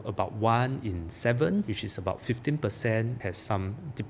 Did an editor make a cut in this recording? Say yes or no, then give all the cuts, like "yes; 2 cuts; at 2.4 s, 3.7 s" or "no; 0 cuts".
yes; 2 cuts; at 1.7 s, 3.2 s